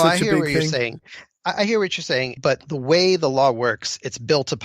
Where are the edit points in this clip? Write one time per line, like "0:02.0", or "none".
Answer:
0:02.3